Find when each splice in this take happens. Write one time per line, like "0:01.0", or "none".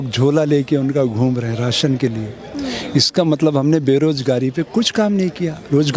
none